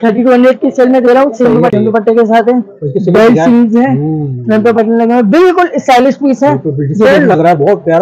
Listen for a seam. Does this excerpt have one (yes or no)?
yes